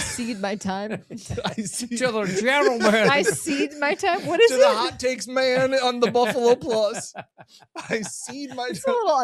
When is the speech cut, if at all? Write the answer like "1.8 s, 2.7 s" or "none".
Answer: none